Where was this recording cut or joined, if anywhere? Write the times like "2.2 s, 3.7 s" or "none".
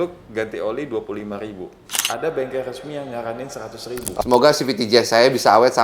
4.2 s